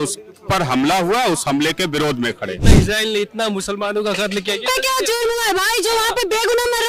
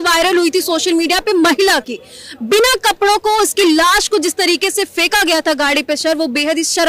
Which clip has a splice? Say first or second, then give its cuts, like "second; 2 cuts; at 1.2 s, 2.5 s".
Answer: first; 1 cut; at 2.7 s